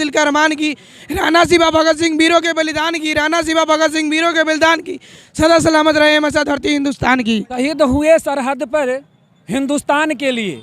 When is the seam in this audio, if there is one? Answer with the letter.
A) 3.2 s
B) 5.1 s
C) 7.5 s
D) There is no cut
C